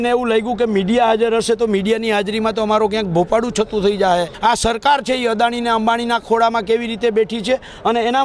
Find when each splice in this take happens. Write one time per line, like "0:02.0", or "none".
0:04.3